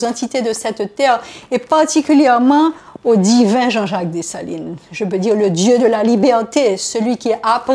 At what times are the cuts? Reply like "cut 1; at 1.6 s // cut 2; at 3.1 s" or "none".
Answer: none

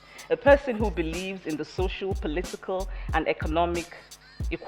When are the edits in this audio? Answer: none

